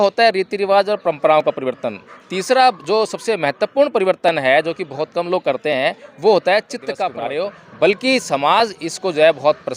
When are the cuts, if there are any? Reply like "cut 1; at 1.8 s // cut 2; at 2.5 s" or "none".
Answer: cut 1; at 7.1 s